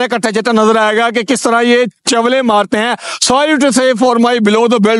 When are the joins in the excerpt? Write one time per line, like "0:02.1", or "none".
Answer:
none